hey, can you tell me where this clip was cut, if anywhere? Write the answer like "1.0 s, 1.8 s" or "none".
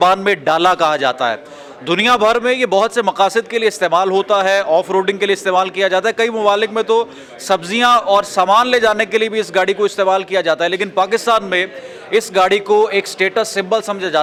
none

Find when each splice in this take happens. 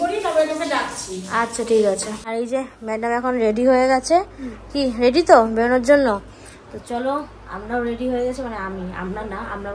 2.2 s

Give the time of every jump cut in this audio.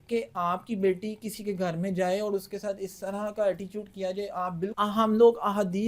4.7 s

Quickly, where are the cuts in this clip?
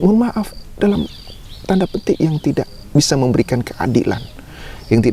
none

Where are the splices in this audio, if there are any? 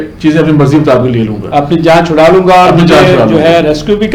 none

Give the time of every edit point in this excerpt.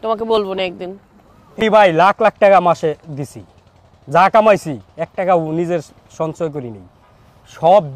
1.6 s

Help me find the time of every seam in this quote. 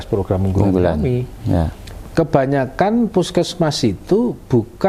1.9 s

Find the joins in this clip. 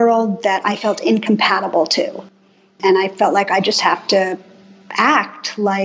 2.8 s

